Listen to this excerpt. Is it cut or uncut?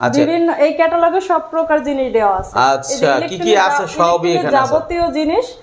uncut